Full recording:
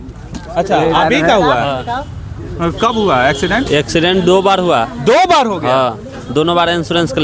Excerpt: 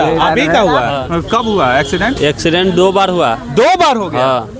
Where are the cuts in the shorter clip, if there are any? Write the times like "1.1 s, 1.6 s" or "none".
1.0 s

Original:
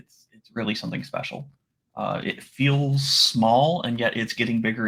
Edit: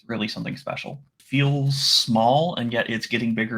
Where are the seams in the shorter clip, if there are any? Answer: 1.2 s

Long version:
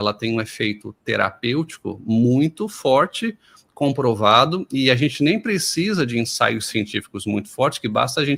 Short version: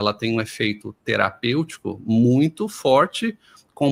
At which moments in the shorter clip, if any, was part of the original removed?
none

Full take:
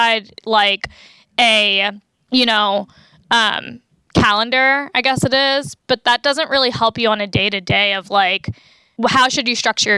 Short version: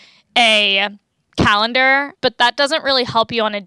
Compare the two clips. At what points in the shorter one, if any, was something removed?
1.1 s, 2.1 s

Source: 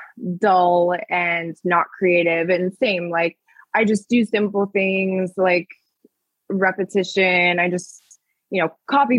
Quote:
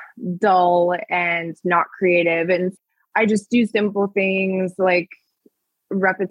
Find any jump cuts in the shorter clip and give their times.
2.7 s

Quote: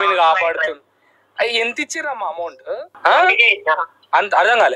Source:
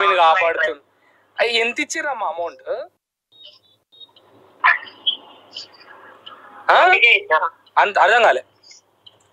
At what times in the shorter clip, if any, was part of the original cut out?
2.9 s

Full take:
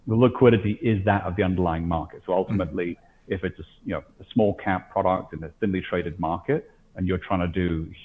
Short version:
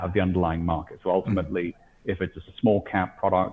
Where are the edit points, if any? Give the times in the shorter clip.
2.4 s

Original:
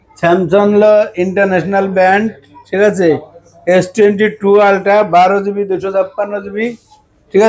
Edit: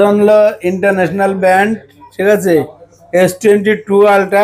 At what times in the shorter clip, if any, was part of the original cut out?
none

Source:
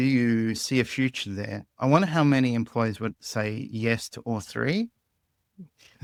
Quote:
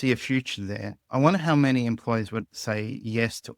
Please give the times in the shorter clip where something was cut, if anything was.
none

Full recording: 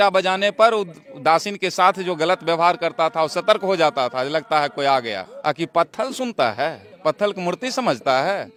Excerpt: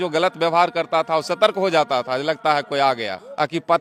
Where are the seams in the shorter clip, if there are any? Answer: none

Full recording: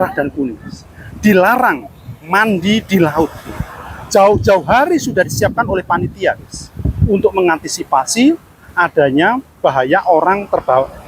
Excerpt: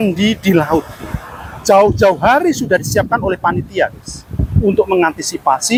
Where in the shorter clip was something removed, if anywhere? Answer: none

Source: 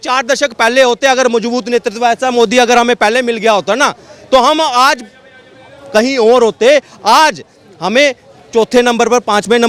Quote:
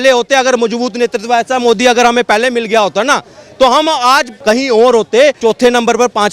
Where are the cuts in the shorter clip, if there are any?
4.3 s, 5.4 s

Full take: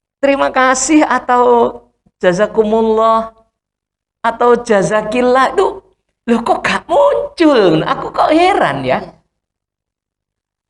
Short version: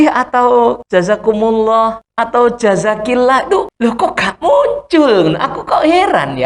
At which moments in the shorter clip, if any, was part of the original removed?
0.8 s, 2.0 s, 3.7 s

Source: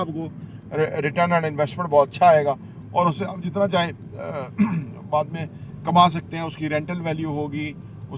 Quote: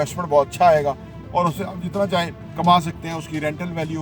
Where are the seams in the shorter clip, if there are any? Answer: 2.4 s

